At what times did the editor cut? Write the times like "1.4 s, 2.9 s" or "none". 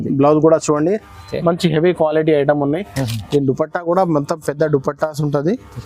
none